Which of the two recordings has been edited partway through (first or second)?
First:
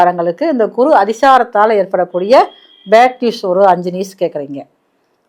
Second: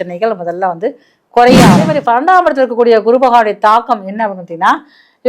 second